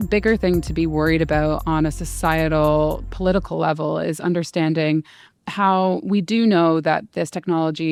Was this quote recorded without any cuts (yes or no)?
yes